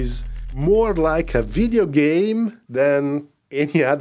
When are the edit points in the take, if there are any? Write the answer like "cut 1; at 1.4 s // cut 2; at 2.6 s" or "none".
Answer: cut 1; at 2.6 s